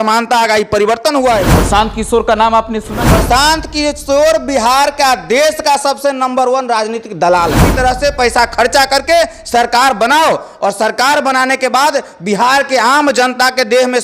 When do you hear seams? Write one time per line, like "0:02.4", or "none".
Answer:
0:01.5
0:03.1
0:07.7